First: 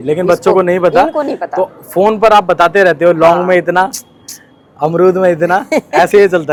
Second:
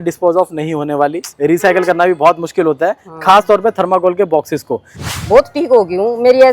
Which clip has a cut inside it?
second; 1 cut; at 5.0 s

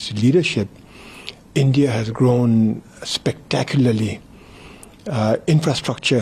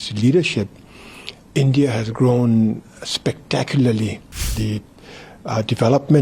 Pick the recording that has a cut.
second; 1 cut; at 4.5 s

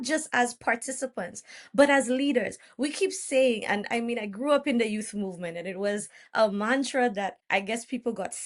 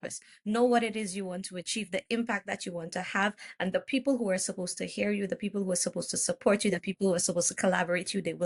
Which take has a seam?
first; 1 cut; at 7.4 s

